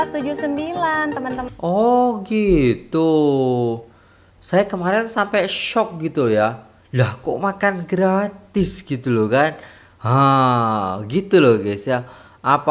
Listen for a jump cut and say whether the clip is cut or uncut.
uncut